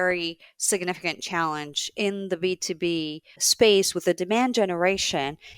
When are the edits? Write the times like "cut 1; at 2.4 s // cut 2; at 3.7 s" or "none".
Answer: cut 1; at 3.4 s